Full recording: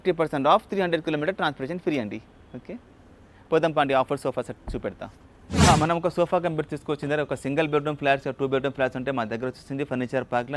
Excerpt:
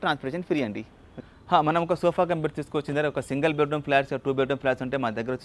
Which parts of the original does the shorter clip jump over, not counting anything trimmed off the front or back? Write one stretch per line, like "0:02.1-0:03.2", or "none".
0:02.9-0:05.7